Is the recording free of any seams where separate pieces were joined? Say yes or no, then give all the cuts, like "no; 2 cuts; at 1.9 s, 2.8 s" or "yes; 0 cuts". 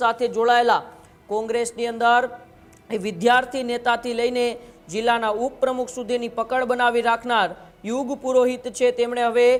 yes; 0 cuts